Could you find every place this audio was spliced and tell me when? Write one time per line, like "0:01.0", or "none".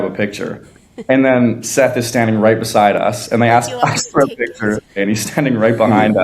0:05.0